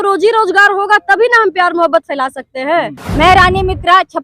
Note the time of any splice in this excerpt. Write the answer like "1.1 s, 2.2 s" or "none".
3.0 s